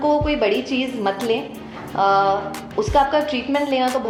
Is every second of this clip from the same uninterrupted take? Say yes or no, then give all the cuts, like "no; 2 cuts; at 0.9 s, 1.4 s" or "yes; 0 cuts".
yes; 0 cuts